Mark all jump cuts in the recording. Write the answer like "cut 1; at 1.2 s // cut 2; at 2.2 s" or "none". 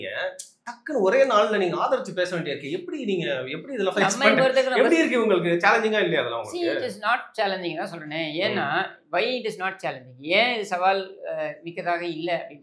none

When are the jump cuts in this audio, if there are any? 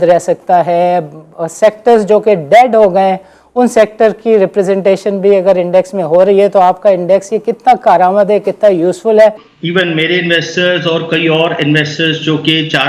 cut 1; at 9.5 s

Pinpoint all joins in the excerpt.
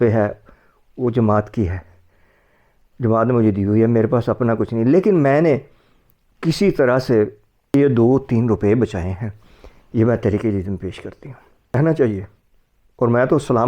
cut 1; at 7.7 s // cut 2; at 11.7 s

